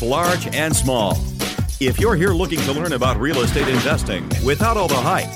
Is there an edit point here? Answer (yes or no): no